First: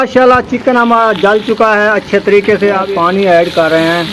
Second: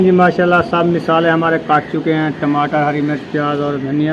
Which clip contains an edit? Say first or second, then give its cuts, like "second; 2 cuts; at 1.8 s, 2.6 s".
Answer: first; 1 cut; at 2.9 s